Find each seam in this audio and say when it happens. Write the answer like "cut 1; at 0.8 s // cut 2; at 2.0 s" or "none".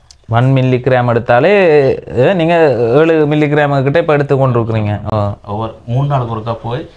none